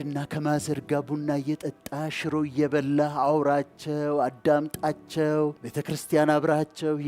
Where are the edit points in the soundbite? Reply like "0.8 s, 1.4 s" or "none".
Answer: 5.7 s